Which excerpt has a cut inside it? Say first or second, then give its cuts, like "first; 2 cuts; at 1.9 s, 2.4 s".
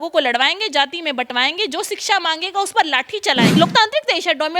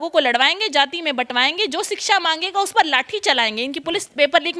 first; 1 cut; at 3.6 s